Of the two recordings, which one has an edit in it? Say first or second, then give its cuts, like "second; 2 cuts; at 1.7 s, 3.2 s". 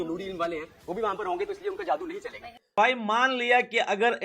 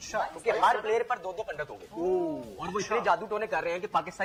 first; 1 cut; at 2.7 s